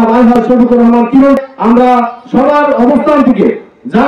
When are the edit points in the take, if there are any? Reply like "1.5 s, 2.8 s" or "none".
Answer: 1.4 s